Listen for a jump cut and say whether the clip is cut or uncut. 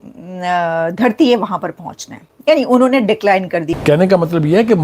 cut